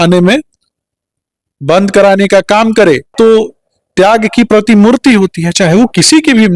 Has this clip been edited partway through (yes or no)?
yes